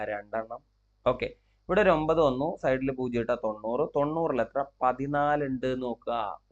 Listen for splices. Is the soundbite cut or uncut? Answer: uncut